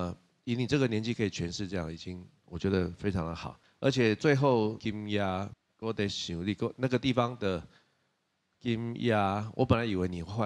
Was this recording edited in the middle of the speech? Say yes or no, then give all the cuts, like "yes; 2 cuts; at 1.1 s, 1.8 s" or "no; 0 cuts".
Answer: no; 0 cuts